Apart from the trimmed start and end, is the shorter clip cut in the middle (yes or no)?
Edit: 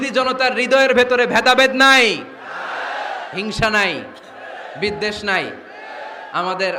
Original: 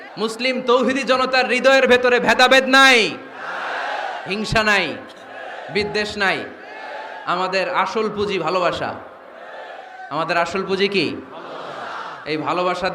no